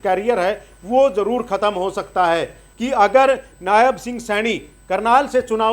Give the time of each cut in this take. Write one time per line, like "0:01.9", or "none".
0:02.6